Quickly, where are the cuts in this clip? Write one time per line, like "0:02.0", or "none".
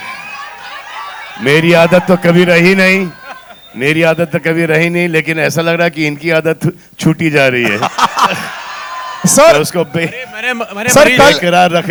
none